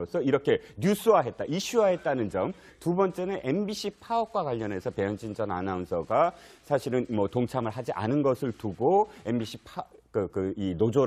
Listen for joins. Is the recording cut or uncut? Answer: uncut